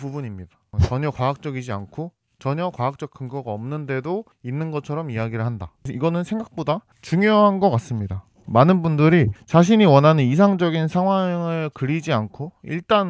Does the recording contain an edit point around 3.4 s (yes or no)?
no